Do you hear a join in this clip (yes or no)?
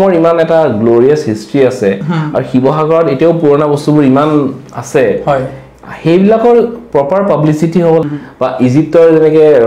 yes